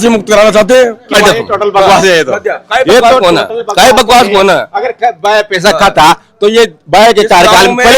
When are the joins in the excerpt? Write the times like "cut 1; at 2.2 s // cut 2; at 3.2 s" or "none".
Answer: cut 1; at 1.1 s